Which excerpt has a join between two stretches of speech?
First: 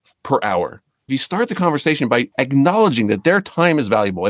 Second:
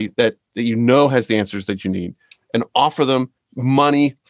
first; 2 cuts; at 1.0 s, 2.3 s

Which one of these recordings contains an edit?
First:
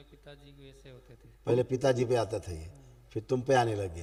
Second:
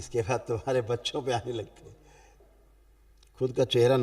second; 1 cut; at 2.3 s

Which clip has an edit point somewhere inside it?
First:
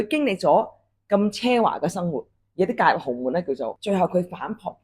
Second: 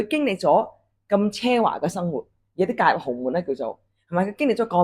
first; 1 cut; at 3.8 s

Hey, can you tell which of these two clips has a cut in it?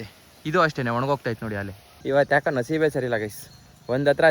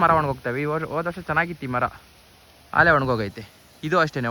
first; 1 cut; at 1.9 s

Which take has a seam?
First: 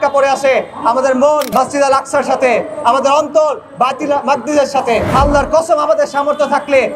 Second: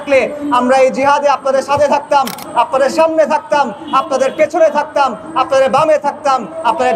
first; 2 cuts; at 1.5 s, 5.1 s

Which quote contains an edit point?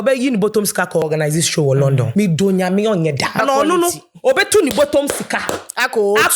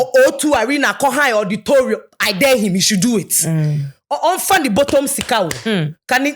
first; 3 cuts; at 1.0 s, 2.1 s, 3.4 s

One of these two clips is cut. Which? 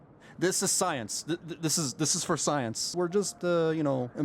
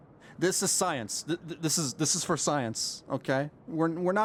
first; 1 cut; at 2.9 s

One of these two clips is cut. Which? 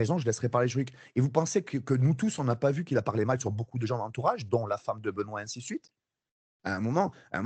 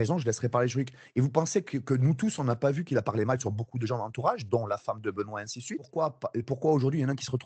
second; 1 cut; at 5.9 s

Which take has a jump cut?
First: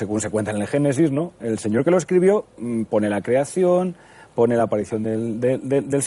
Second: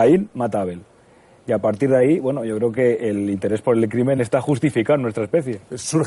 first; 1 cut; at 1.2 s

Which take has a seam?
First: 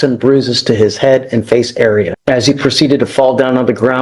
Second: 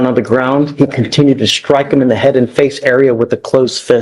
first; 1 cut; at 2.2 s

